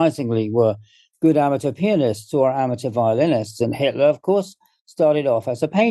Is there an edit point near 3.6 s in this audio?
no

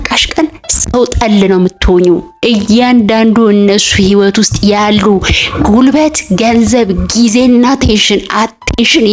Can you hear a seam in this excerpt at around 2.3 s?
yes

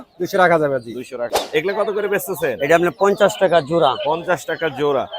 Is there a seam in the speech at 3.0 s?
no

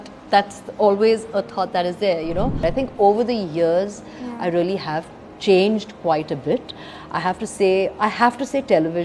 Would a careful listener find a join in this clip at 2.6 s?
yes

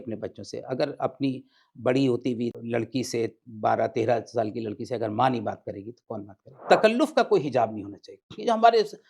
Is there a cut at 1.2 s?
no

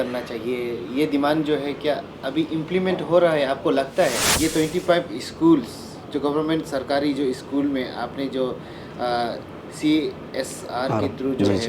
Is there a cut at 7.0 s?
no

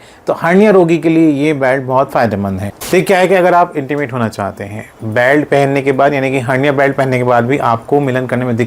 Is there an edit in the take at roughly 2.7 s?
yes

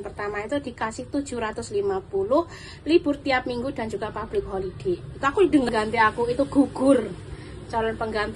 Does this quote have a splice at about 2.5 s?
no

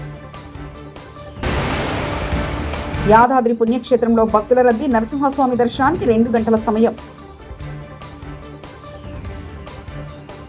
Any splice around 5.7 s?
no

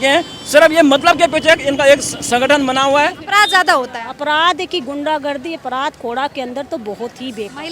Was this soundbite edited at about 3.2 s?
yes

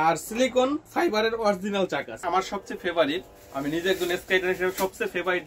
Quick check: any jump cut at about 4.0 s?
no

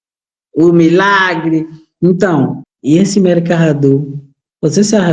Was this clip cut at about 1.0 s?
no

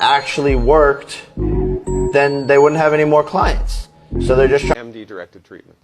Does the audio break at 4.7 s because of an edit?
yes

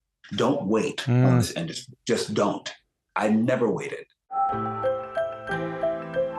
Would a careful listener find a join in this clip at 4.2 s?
yes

